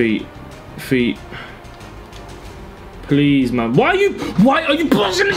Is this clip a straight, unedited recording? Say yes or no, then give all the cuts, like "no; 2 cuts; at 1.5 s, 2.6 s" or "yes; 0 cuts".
yes; 0 cuts